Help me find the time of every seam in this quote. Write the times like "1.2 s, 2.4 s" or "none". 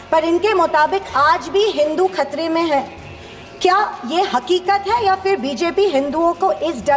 none